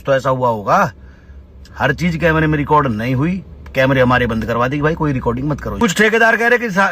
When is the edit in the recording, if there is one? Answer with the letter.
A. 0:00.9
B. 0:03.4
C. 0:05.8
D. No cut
C